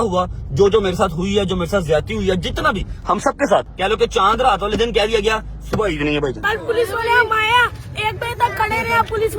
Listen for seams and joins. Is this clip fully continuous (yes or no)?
no